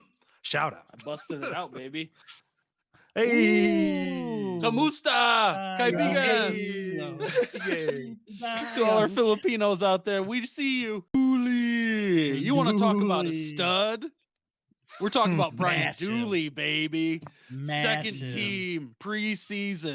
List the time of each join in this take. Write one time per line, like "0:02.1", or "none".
0:11.2